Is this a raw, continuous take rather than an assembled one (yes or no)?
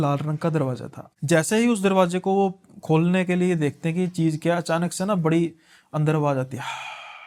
yes